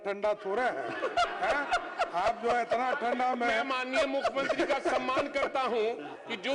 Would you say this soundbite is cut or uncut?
uncut